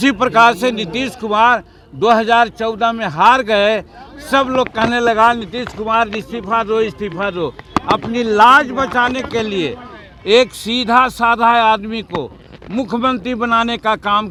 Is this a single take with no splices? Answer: yes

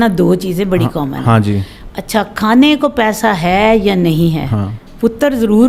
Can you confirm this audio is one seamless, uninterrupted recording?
yes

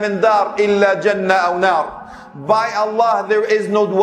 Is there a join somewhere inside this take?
no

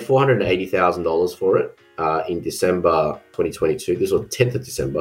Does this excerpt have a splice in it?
yes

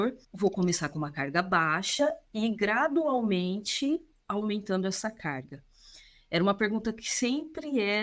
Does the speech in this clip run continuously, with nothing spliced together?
yes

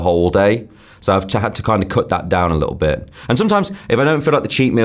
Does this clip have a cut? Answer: no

